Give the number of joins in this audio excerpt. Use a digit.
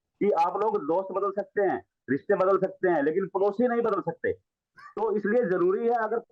0